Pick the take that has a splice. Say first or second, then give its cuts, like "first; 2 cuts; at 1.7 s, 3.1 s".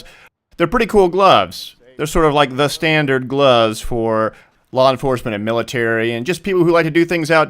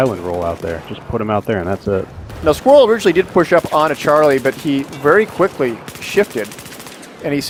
first; 1 cut; at 1.1 s